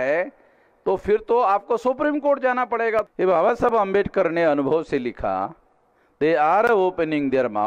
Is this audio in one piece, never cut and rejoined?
no; 1 cut; at 3.1 s

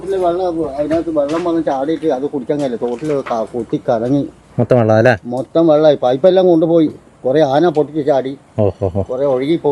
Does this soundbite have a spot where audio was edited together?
no; 0 cuts

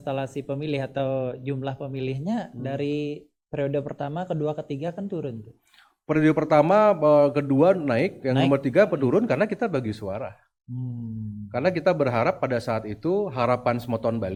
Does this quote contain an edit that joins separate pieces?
no; 0 cuts

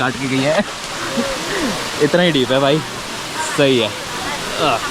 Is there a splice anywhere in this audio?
no; 0 cuts

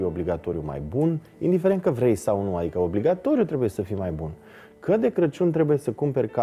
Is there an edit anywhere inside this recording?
no; 0 cuts

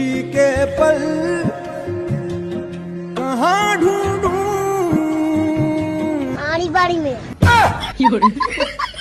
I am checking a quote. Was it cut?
no; 0 cuts

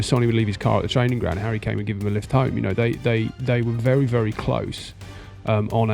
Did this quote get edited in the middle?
no; 0 cuts

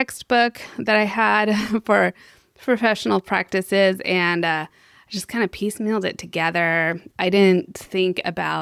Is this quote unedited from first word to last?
yes; 0 cuts

